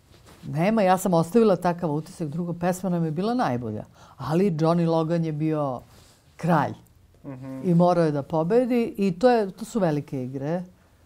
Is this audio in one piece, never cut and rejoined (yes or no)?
yes